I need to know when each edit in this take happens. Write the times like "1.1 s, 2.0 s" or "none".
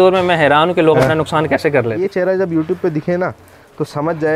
2.0 s